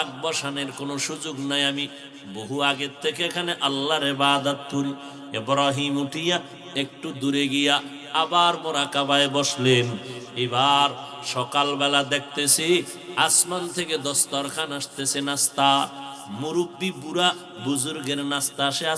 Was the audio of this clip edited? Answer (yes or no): no